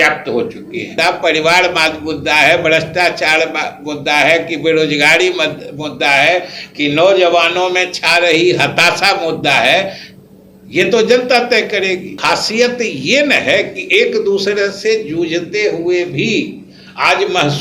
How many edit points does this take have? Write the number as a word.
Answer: two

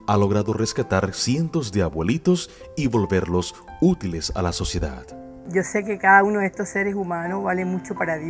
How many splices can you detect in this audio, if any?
zero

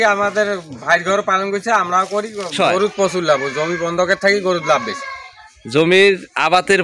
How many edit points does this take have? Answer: one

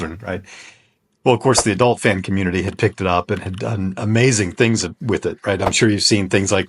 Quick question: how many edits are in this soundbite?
zero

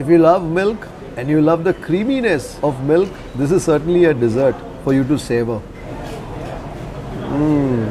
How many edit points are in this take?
two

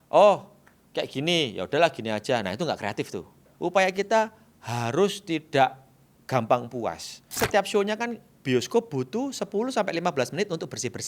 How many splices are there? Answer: two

